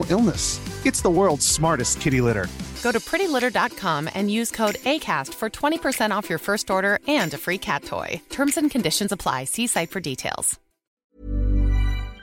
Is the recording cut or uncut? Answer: cut